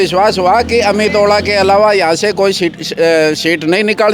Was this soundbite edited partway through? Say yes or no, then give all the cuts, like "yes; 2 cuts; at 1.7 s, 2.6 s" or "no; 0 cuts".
no; 0 cuts